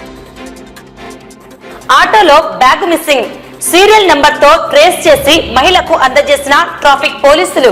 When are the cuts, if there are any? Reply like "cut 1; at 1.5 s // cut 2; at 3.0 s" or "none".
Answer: none